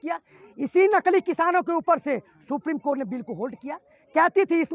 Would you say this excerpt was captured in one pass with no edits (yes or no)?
yes